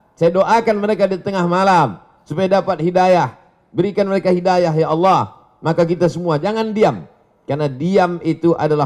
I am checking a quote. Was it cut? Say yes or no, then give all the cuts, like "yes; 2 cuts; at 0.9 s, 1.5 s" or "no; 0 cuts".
no; 0 cuts